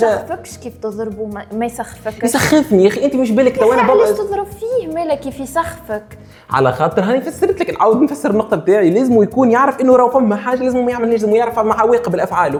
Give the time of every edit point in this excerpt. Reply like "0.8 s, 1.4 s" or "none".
none